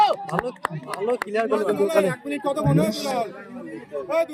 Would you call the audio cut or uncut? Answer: uncut